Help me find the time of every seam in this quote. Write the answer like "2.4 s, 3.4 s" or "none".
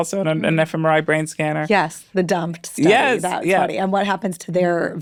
none